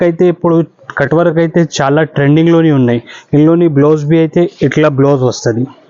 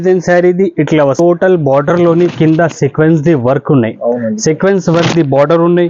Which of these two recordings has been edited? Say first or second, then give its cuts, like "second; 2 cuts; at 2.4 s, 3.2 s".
second; 1 cut; at 1.2 s